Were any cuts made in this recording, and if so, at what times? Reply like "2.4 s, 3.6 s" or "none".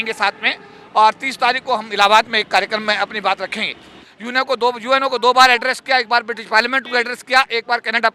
4.0 s

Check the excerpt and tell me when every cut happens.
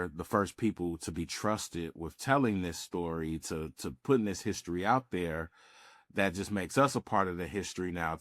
none

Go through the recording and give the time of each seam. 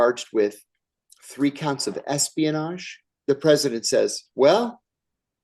3.0 s

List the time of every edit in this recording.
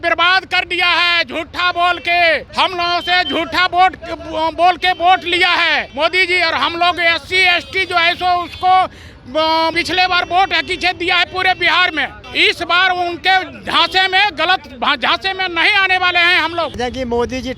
2.5 s, 5.9 s, 9.7 s, 12.2 s, 16.8 s

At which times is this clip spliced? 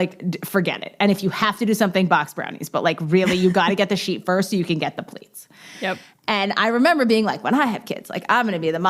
none

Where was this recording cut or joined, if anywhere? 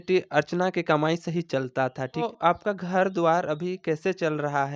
2.3 s

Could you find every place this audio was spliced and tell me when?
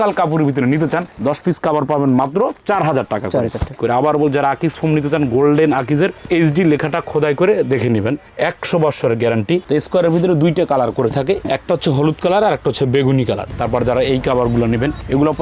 3.8 s, 9.6 s, 11.5 s, 13.5 s

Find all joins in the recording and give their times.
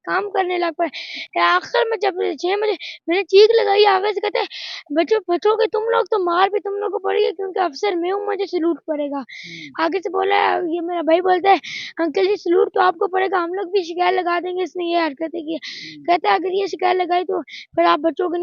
none

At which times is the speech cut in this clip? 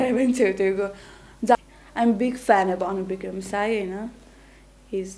1.6 s

